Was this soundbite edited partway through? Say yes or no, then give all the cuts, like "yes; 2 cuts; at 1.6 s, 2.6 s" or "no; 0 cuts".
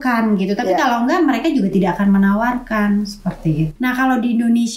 yes; 1 cut; at 3.7 s